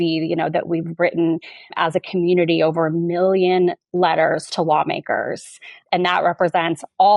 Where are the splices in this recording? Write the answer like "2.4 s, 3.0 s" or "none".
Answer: 1.8 s, 5.8 s